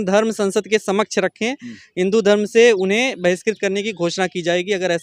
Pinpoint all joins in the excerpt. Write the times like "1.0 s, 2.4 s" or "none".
none